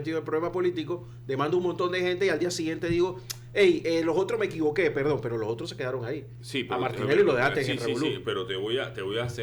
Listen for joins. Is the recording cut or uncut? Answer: uncut